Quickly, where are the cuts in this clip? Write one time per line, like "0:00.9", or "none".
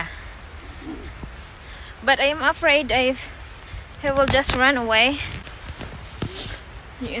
0:05.5